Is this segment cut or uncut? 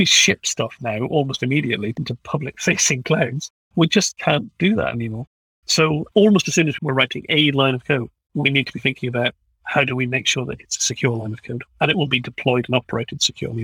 uncut